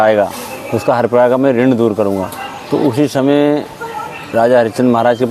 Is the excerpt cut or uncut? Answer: uncut